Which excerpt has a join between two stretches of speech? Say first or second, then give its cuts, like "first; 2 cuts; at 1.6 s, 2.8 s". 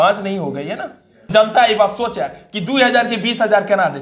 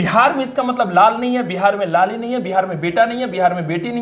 first; 1 cut; at 1.3 s